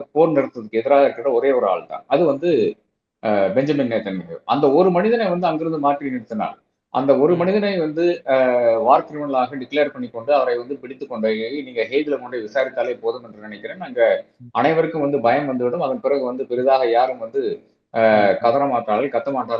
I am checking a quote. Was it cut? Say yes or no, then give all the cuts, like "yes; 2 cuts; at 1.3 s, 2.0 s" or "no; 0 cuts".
no; 0 cuts